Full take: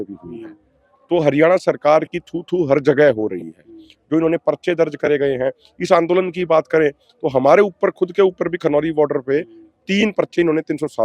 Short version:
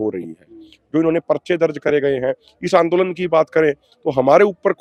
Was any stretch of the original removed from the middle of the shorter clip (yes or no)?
no